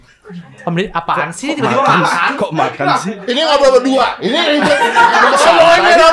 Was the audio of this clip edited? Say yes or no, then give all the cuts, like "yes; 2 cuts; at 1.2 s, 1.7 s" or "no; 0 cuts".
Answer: yes; 1 cut; at 3.2 s